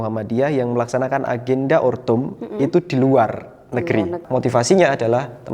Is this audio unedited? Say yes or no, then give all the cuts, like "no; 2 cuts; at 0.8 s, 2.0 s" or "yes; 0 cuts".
no; 1 cut; at 4.2 s